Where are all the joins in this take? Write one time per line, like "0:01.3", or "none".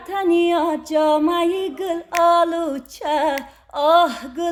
none